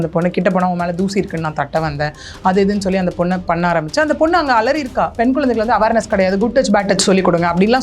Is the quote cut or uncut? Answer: cut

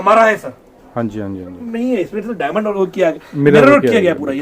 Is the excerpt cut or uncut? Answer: cut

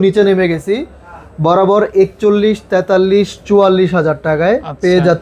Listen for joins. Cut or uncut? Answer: uncut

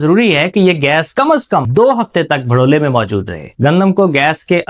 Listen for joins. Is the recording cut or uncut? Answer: cut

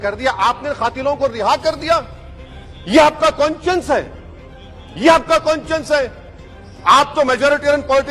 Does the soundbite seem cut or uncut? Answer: uncut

